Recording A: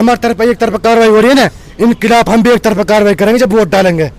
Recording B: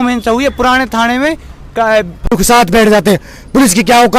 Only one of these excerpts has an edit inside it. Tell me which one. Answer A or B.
B